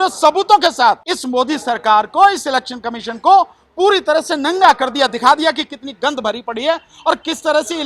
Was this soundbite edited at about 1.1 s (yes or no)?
yes